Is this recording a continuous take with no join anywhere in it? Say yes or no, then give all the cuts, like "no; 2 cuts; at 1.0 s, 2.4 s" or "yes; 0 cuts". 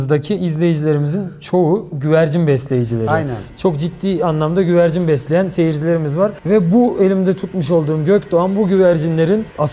yes; 0 cuts